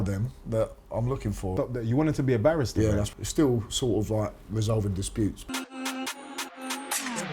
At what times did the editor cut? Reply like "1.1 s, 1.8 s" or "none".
1.5 s, 3.1 s, 5.4 s